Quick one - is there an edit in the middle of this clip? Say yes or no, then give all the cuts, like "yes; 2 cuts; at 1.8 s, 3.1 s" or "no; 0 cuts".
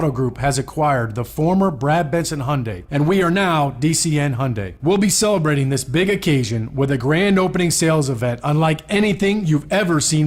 yes; 2 cuts; at 2.8 s, 4.6 s